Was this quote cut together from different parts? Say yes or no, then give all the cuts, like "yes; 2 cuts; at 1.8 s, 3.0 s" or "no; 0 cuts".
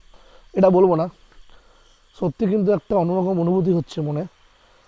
no; 0 cuts